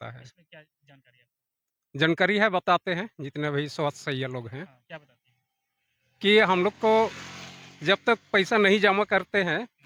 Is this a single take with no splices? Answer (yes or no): yes